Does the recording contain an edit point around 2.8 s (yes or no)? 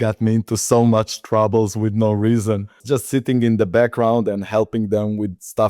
yes